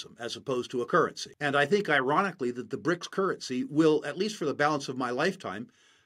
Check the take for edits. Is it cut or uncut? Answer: cut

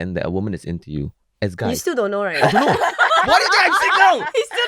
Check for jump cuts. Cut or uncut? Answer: uncut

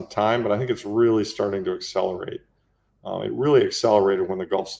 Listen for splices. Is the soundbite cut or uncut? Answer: uncut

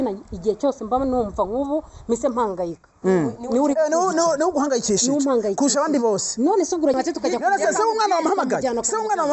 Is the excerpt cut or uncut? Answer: cut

